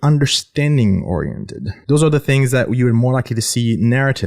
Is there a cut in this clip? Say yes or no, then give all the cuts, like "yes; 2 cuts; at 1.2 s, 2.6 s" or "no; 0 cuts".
yes; 1 cut; at 1.8 s